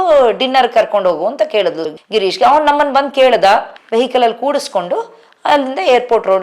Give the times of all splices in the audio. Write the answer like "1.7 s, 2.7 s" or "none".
3.7 s